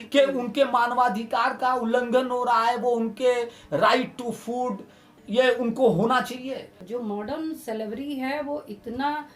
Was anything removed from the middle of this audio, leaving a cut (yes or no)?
yes